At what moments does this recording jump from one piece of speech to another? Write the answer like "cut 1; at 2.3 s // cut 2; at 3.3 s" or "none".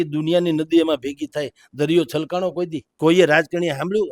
cut 1; at 2.8 s